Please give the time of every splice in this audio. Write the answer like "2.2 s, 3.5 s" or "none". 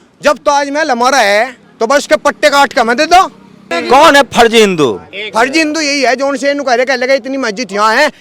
3.7 s